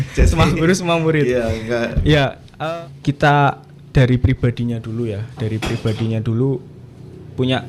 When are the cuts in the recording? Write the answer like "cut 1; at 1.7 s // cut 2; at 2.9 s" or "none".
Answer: cut 1; at 2.4 s